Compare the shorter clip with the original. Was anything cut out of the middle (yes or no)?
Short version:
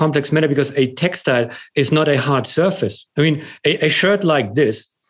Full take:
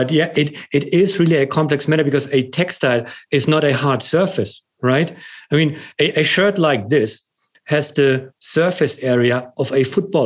yes